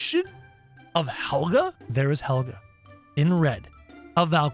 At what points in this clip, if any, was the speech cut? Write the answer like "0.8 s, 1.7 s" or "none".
1.8 s